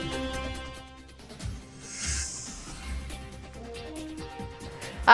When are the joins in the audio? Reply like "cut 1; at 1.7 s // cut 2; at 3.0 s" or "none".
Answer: cut 1; at 1.8 s // cut 2; at 3.1 s